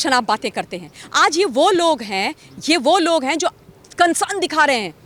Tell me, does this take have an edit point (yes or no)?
no